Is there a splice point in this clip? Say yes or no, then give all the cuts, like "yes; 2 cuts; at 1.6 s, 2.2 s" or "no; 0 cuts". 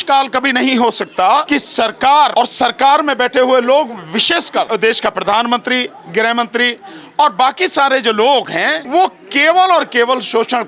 yes; 4 cuts; at 1.5 s, 2.3 s, 4.7 s, 8.8 s